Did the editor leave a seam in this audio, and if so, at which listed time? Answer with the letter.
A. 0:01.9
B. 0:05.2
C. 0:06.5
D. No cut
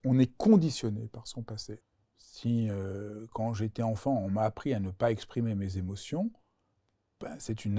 A